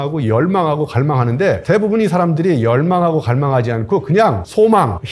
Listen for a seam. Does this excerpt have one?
no; 0 cuts

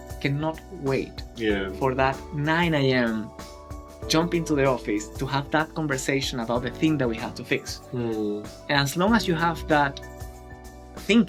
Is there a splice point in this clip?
no; 0 cuts

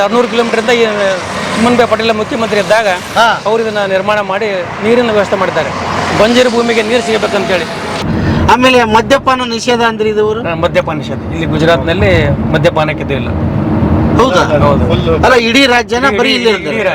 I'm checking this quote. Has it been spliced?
yes; 1 cut; at 8.0 s

